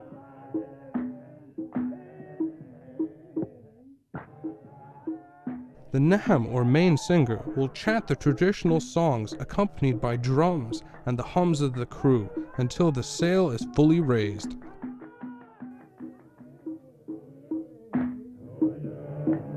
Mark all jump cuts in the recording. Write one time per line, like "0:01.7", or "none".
none